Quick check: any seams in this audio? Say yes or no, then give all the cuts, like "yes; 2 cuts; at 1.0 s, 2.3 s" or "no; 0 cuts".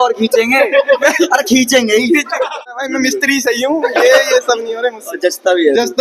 yes; 1 cut; at 2.5 s